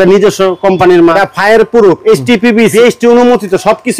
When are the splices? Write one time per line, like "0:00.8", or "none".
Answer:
0:01.2
0:02.7

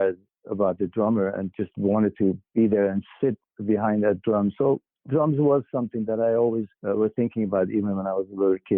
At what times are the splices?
0:02.4
0:06.7

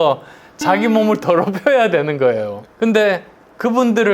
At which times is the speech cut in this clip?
none

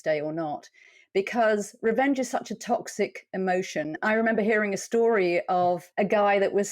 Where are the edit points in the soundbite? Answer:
0:04.0
0:05.9

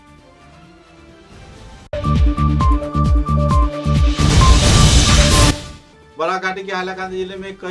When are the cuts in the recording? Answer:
none

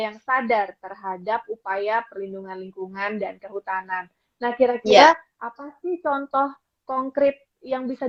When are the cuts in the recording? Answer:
none

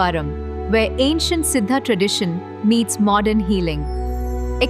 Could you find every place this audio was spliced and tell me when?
none

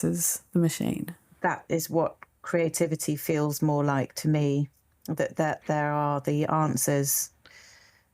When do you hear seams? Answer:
0:01.2

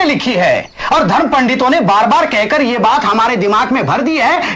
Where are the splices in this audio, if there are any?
none

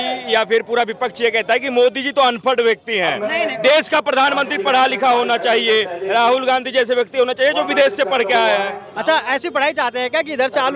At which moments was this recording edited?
none

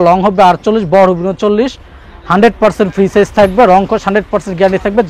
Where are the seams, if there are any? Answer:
none

